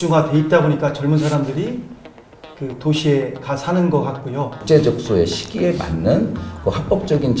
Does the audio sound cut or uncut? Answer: cut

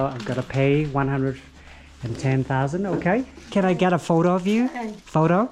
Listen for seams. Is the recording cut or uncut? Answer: cut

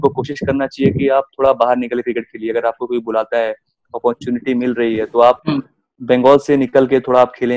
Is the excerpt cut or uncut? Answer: uncut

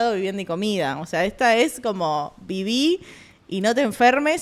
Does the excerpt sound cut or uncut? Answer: uncut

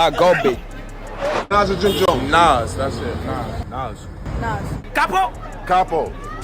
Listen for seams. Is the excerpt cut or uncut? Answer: cut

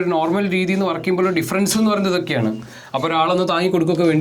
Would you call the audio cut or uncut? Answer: uncut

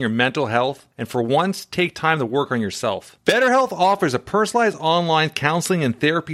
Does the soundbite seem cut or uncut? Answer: uncut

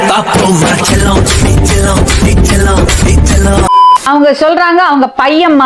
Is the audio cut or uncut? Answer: cut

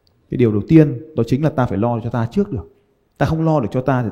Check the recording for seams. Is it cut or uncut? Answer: uncut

